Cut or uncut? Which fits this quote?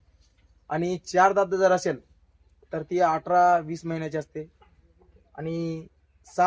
uncut